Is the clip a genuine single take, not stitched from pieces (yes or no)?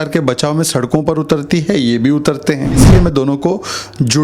no